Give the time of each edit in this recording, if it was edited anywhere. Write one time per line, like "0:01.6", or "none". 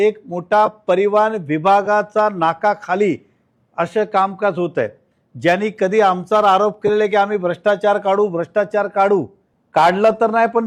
none